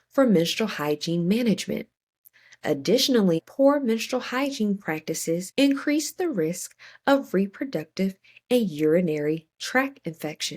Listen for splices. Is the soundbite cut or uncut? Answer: cut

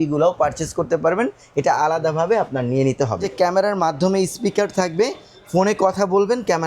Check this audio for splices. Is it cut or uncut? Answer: cut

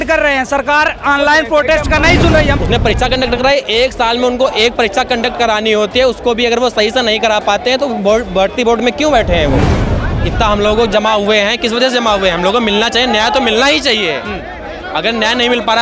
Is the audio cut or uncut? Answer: cut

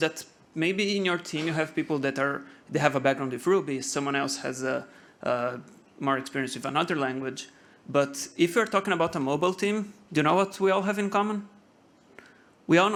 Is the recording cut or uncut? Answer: uncut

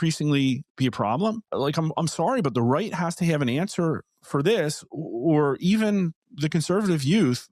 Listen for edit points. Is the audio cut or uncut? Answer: cut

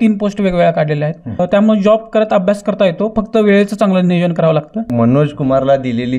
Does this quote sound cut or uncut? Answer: cut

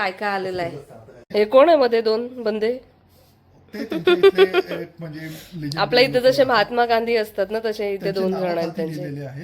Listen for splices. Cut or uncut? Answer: cut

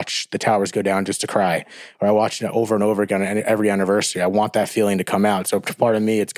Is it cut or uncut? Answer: uncut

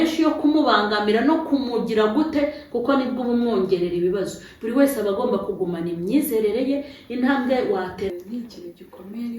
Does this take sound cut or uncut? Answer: cut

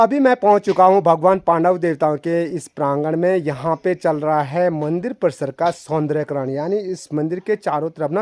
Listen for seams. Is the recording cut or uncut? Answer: uncut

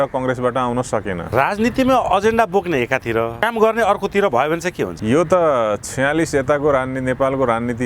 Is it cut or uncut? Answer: cut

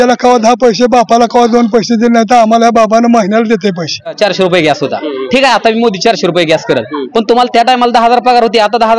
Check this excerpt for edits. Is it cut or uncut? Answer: cut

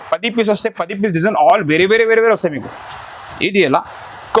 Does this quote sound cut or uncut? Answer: uncut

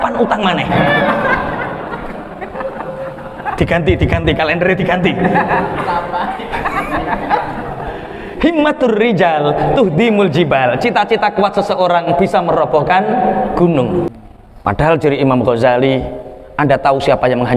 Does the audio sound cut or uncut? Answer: cut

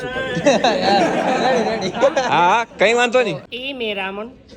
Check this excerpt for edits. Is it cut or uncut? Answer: cut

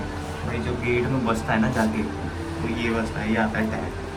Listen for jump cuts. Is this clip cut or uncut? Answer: uncut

